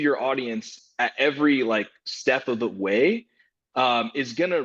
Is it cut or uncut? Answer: uncut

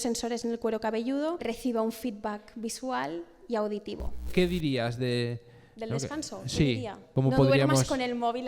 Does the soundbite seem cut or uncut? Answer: cut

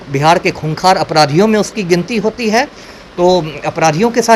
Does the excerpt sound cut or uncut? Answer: uncut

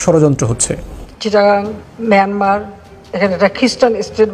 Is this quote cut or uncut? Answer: uncut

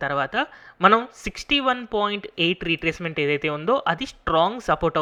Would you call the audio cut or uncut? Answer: uncut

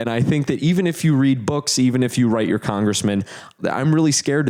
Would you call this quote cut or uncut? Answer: uncut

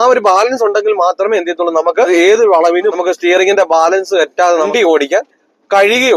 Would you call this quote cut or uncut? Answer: cut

